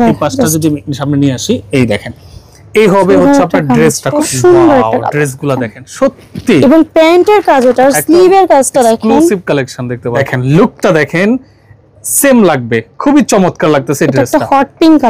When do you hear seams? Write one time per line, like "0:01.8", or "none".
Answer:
0:04.1
0:10.2